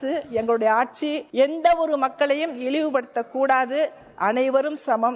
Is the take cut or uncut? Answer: cut